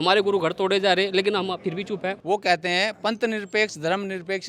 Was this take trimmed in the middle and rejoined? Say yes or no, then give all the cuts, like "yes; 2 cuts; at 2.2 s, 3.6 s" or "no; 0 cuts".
yes; 1 cut; at 2.2 s